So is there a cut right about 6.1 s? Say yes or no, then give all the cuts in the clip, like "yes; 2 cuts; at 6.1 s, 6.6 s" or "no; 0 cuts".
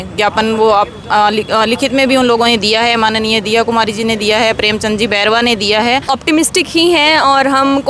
yes; 1 cut; at 6.1 s